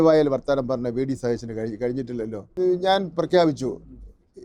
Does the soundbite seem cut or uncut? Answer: cut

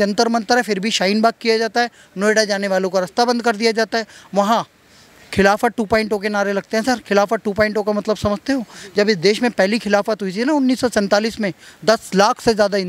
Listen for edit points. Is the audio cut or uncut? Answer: uncut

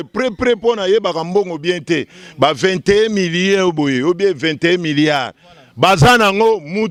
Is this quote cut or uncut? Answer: uncut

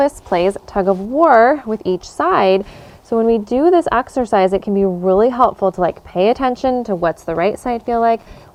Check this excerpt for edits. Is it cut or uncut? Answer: uncut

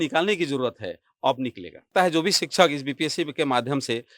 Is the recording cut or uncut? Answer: cut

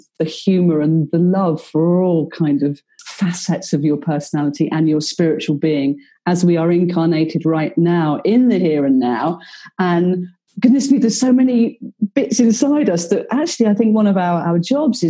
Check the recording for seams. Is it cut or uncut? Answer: cut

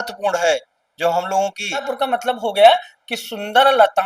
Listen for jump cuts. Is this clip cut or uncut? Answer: cut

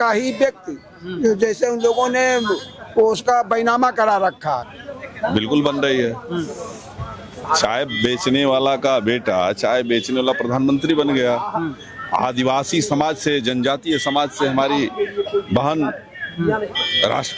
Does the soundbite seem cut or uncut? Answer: cut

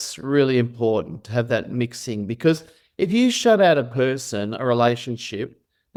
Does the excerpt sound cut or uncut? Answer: uncut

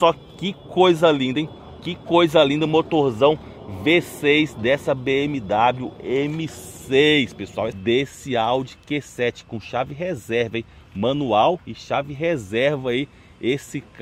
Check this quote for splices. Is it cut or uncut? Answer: cut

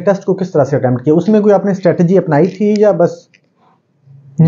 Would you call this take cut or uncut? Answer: uncut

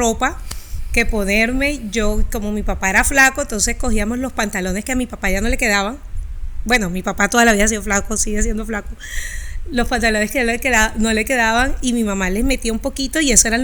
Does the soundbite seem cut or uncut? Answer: uncut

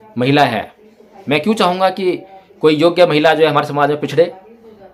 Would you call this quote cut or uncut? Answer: uncut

